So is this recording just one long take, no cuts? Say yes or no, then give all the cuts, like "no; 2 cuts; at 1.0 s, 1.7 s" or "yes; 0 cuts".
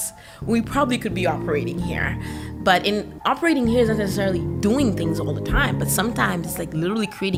yes; 0 cuts